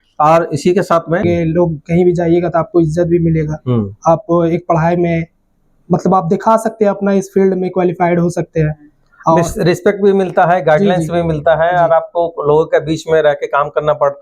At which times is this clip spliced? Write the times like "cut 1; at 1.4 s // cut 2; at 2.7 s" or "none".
cut 1; at 1.2 s